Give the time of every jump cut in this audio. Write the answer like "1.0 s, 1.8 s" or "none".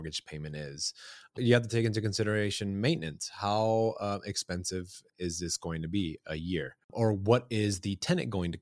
1.4 s, 5.1 s, 6.8 s

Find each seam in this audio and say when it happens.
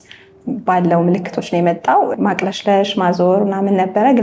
2.1 s

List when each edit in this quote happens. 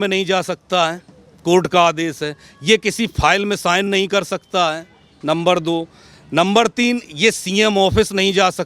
none

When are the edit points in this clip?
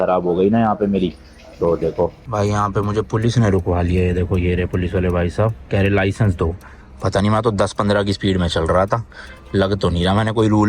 2.2 s

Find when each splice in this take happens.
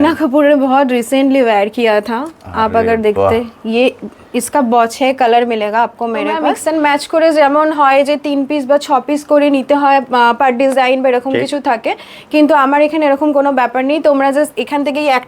6.5 s

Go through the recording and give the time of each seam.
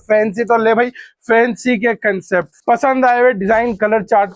2.5 s

